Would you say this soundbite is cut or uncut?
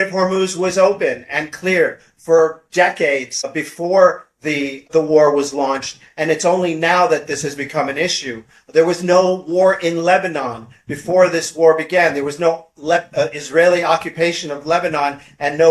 uncut